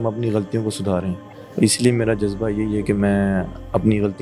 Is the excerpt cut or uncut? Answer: uncut